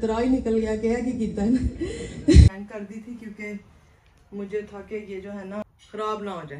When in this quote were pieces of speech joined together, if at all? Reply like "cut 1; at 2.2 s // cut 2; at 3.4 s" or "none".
cut 1; at 2.5 s // cut 2; at 5.6 s